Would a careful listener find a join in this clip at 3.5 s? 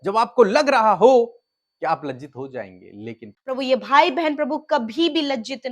yes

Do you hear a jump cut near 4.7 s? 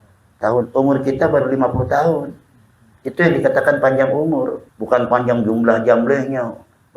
yes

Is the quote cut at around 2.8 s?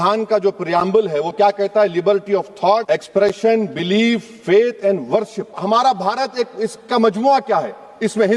yes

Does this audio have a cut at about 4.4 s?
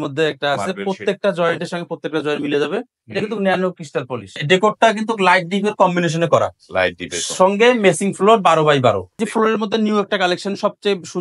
yes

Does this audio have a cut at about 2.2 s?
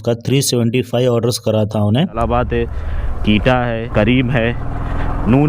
yes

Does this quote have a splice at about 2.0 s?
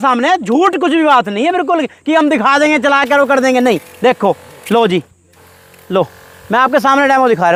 no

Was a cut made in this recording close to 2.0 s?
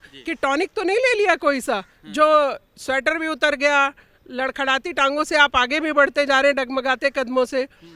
no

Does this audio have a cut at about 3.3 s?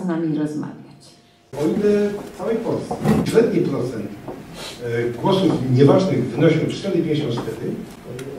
yes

